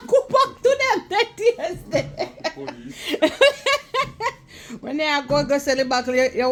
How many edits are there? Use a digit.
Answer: 0